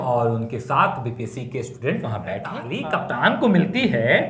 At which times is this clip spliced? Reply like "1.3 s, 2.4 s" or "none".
2.7 s